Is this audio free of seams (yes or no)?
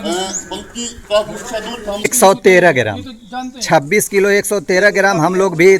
no